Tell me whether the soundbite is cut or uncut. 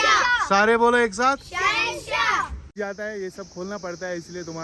cut